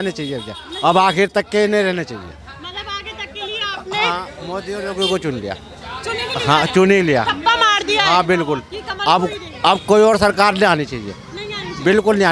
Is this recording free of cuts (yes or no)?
yes